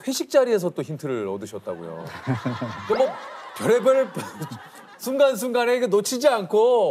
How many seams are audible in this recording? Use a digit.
0